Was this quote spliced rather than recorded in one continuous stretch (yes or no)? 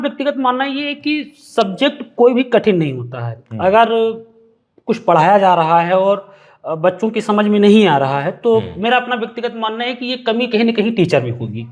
no